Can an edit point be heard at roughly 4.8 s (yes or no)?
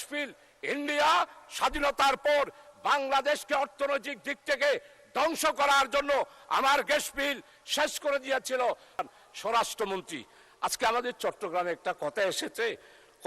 no